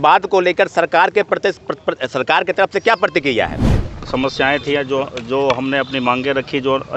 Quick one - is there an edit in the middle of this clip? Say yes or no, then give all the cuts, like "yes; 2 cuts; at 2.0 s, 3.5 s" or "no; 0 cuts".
yes; 1 cut; at 3.8 s